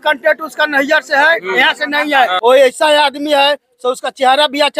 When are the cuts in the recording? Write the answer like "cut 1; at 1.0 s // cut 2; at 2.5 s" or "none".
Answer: cut 1; at 2.4 s